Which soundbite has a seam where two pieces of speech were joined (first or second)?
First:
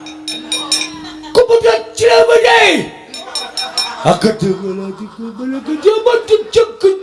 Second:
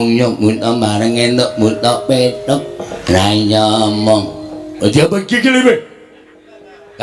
second